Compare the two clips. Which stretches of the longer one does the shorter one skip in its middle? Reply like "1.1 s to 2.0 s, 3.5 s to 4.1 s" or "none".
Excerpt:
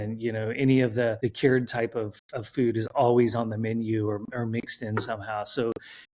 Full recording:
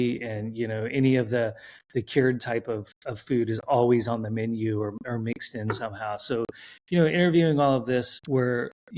1.5 s to 1.9 s